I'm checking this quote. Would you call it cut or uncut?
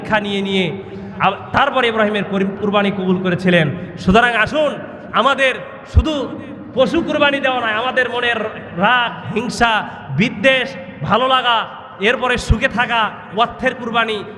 uncut